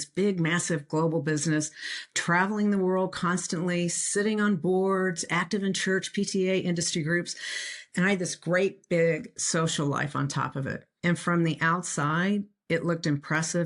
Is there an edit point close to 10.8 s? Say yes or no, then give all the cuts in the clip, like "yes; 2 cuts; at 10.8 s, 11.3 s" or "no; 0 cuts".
yes; 1 cut; at 10.8 s